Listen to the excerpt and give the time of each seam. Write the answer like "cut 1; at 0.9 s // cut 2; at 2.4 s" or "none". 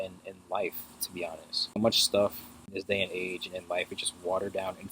cut 1; at 1.8 s // cut 2; at 2.7 s